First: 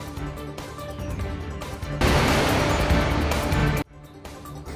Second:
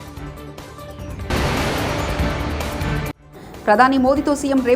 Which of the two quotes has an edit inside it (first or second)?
second